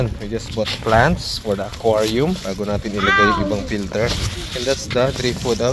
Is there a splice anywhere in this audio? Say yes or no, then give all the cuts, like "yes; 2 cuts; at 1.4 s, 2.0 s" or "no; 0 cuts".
no; 0 cuts